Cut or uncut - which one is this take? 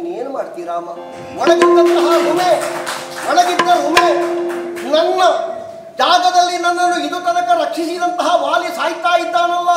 uncut